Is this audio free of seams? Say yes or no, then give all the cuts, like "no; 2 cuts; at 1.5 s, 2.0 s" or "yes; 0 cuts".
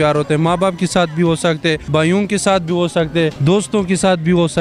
no; 2 cuts; at 1.8 s, 3.4 s